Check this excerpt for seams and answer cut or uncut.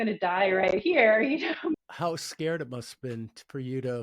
cut